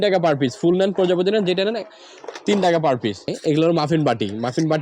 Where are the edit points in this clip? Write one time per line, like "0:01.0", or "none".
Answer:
0:03.3